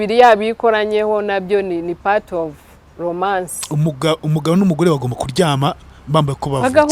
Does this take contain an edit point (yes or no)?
no